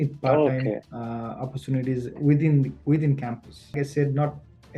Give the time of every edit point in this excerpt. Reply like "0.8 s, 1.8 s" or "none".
0.9 s, 3.8 s